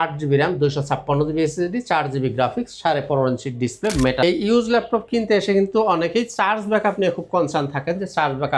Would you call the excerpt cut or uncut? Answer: cut